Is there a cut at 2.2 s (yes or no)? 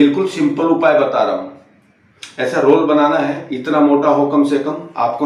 no